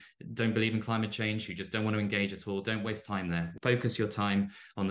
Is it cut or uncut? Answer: cut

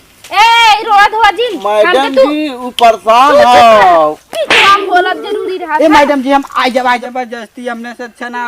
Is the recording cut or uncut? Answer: cut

